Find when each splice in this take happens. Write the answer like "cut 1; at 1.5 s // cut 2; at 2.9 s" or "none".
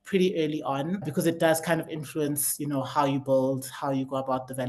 cut 1; at 1.1 s